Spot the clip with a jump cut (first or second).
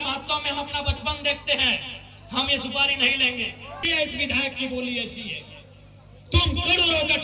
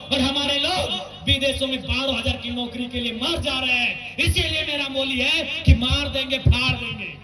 first